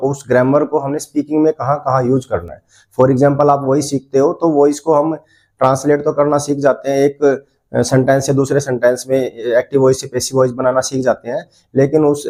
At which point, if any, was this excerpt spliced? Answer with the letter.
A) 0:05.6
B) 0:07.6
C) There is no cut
C